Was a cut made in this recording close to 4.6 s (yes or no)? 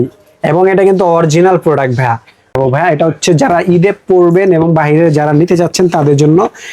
no